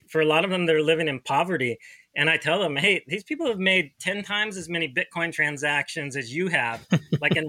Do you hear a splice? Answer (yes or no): no